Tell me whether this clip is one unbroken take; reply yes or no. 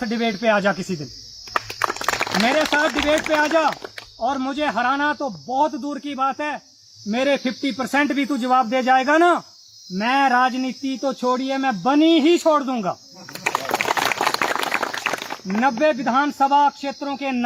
yes